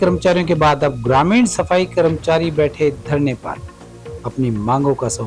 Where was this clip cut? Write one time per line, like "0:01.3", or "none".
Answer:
none